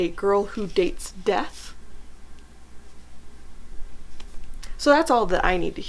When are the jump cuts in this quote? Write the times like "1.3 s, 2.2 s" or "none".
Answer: none